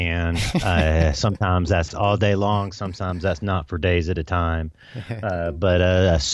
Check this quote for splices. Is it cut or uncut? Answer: uncut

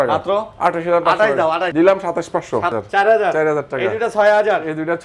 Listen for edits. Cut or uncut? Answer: cut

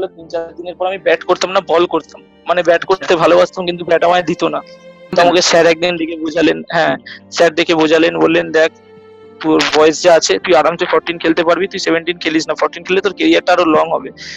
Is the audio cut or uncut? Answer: cut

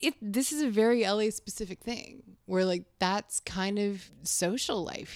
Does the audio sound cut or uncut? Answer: cut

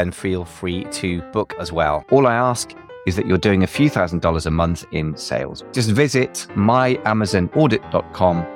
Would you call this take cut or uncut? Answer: cut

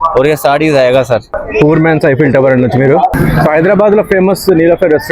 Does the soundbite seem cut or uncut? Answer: cut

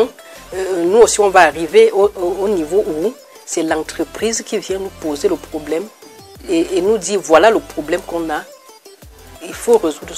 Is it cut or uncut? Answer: uncut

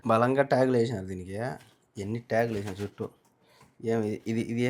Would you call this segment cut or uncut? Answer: uncut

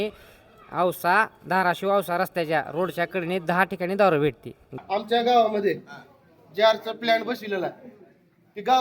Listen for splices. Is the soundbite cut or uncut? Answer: cut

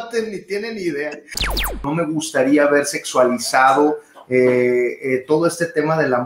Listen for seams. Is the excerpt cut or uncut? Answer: cut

